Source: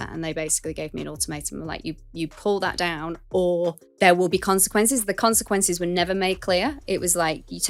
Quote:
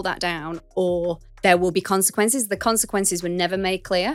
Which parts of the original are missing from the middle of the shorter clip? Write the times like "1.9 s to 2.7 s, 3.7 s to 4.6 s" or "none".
none